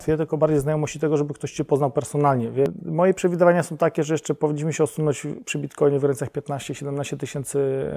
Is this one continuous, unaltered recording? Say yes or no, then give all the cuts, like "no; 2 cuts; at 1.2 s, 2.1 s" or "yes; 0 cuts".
no; 1 cut; at 2.8 s